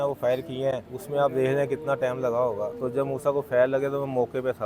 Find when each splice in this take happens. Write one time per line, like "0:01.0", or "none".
0:00.9
0:02.8